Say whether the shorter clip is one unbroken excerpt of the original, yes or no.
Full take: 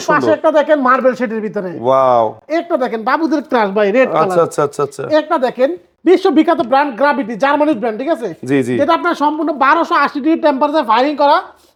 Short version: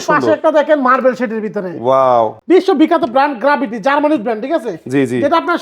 no